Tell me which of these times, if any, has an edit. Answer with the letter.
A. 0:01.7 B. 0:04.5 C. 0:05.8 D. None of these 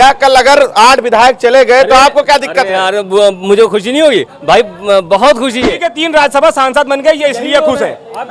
C